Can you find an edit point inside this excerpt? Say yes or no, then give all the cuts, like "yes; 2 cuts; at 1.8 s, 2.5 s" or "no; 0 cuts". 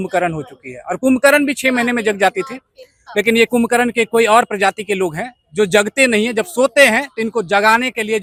no; 0 cuts